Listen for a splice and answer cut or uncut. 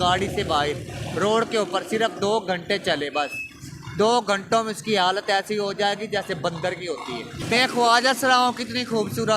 cut